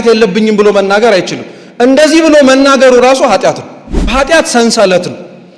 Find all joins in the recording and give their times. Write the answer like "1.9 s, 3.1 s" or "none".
4.1 s